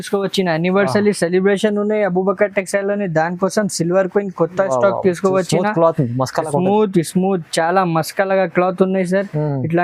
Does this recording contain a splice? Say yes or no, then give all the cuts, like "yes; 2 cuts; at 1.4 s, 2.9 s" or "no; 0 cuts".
no; 0 cuts